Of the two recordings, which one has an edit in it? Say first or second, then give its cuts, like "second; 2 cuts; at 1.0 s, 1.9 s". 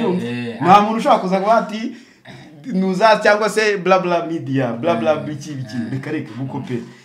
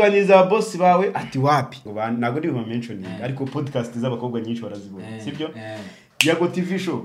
second; 1 cut; at 1.8 s